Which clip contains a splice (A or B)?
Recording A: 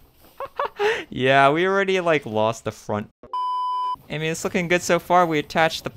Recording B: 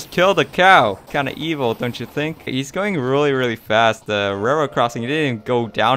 B